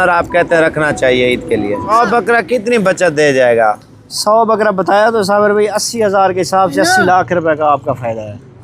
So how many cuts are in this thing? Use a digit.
1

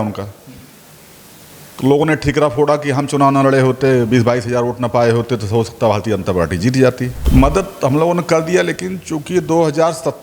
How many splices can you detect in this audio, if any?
1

